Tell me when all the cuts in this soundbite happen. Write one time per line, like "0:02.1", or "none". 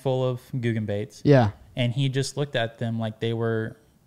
none